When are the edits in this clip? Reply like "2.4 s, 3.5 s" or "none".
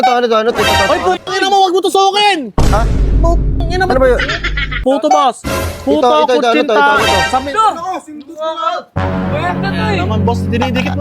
4.7 s

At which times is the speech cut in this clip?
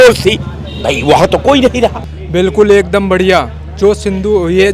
2.1 s

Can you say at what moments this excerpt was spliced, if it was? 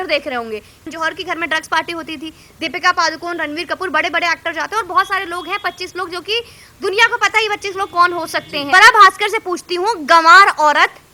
0.8 s, 8.7 s

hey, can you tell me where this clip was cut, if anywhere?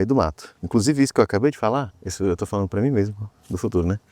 2.0 s

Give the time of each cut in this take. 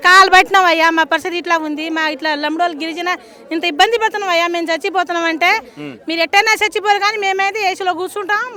none

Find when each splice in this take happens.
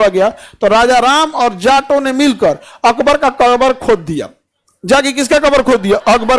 none

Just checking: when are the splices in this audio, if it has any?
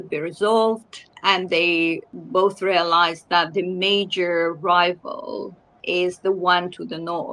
1.1 s, 2.1 s, 5.8 s

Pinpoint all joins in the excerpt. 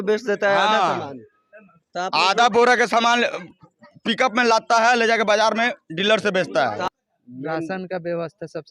6.8 s

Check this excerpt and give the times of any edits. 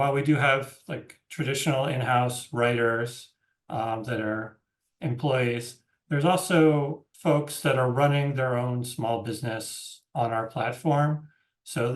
7.0 s

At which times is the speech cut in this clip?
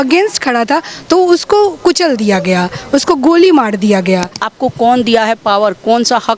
4.4 s

